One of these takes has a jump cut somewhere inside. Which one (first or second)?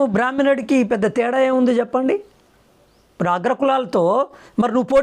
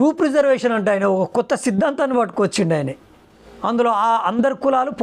second